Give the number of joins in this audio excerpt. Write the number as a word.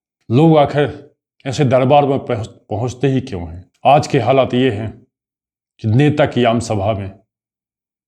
one